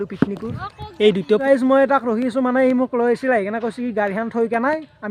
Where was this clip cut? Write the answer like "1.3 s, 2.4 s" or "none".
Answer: 1.4 s

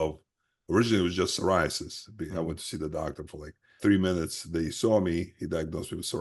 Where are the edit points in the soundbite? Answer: 3.8 s

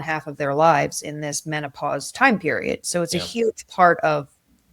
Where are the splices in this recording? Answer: none

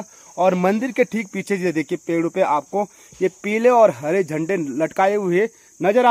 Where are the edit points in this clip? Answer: none

